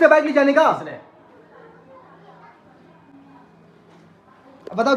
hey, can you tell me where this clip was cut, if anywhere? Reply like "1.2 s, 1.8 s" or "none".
none

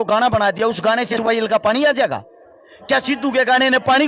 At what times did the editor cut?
1.1 s

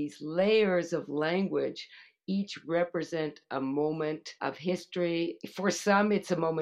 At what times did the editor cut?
4.3 s, 5.4 s

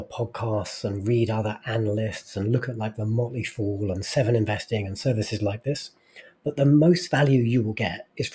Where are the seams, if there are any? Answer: none

